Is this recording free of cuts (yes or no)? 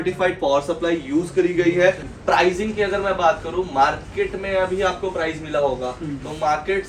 no